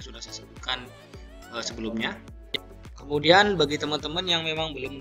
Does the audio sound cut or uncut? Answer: cut